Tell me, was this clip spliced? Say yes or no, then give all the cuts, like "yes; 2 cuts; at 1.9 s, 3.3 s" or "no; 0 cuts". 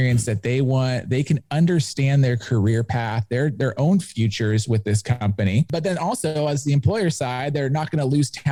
no; 0 cuts